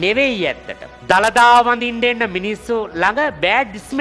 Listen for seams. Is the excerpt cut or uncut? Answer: cut